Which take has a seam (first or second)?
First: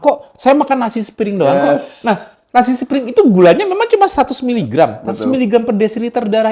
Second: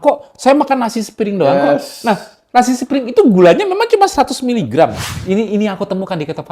second